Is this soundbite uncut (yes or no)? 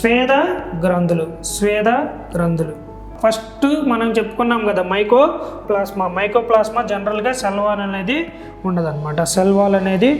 no